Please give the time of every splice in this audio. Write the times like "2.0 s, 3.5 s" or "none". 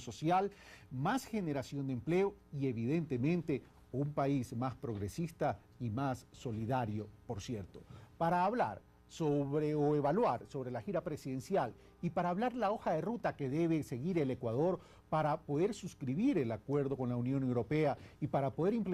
11.6 s